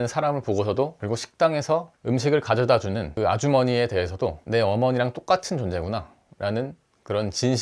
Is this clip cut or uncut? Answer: cut